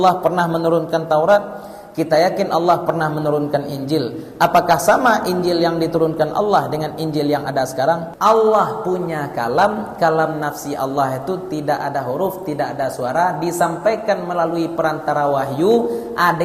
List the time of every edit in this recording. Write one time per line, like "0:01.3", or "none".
0:08.1